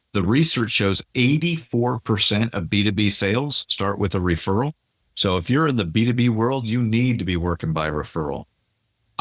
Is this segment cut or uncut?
uncut